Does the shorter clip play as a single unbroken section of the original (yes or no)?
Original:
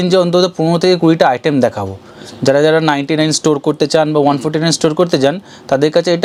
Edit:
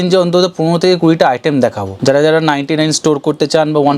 no